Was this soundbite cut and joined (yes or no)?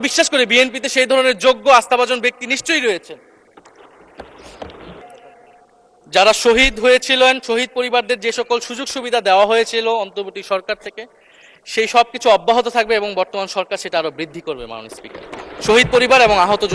yes